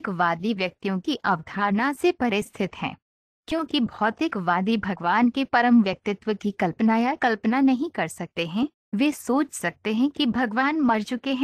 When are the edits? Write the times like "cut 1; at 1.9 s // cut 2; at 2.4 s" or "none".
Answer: cut 1; at 7.2 s